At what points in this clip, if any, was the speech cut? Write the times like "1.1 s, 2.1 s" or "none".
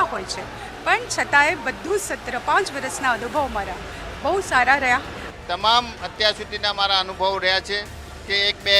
5.2 s